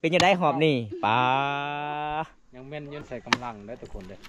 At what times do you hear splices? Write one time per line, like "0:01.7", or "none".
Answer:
0:03.0